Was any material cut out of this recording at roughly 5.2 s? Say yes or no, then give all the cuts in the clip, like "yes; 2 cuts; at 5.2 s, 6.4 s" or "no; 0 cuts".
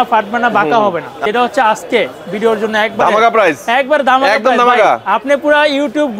no; 1 cut; at 1.1 s